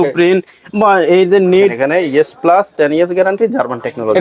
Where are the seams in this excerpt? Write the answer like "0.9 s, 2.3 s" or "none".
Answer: 1.8 s